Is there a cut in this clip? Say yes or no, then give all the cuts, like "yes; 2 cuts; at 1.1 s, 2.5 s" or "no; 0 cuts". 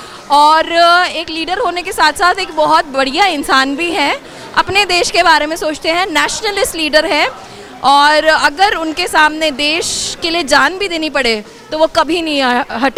no; 0 cuts